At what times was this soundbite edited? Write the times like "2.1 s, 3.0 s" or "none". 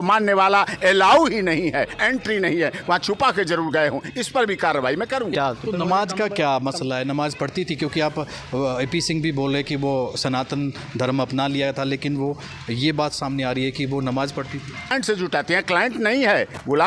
5.3 s, 14.9 s